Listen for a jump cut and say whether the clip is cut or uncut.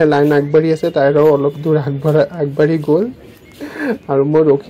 uncut